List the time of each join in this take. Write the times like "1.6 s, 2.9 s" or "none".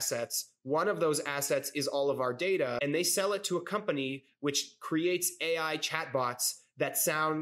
2.8 s